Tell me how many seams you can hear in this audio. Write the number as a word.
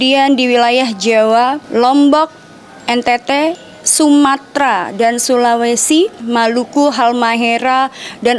two